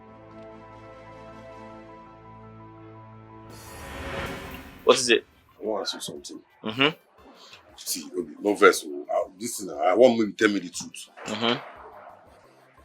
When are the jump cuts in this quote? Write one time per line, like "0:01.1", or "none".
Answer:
0:04.3